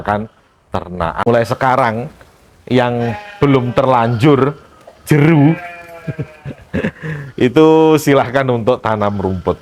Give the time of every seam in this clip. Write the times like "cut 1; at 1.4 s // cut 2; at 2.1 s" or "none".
cut 1; at 1.2 s